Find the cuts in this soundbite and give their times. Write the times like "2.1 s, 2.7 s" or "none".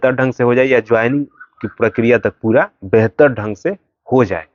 none